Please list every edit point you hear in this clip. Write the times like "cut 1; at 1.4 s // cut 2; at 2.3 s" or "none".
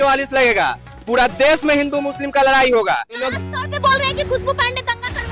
cut 1; at 3.3 s